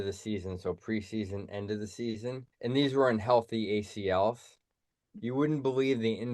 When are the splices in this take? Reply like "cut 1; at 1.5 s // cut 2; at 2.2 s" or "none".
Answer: cut 1; at 2.5 s